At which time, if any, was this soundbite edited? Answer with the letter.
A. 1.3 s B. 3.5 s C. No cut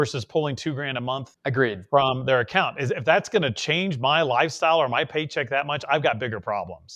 A